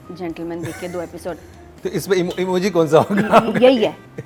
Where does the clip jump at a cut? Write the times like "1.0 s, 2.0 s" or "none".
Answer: none